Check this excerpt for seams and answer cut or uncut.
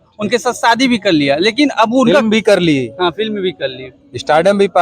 uncut